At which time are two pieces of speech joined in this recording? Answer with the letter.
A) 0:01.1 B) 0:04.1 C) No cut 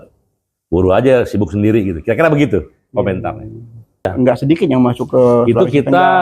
B